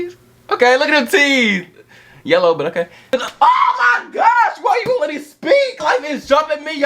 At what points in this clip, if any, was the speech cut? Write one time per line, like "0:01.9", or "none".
0:03.0
0:05.8